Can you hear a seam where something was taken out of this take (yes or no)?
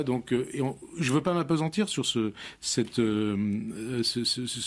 no